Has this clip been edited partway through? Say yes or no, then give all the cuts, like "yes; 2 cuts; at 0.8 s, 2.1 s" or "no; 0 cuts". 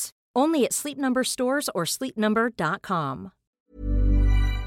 yes; 1 cut; at 3.5 s